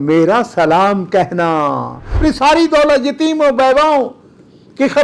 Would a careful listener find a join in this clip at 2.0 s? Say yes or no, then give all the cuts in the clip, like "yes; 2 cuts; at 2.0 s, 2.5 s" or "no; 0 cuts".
yes; 1 cut; at 2.0 s